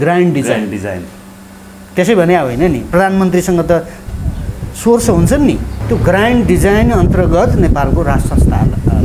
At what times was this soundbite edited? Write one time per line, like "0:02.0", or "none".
0:05.7